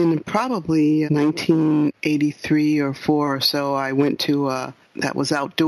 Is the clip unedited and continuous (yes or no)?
no